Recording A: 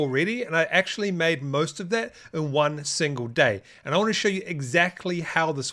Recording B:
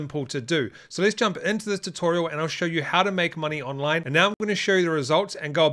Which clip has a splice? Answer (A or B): B